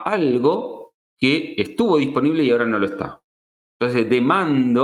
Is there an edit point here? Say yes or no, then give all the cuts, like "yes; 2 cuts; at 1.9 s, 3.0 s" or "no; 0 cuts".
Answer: no; 0 cuts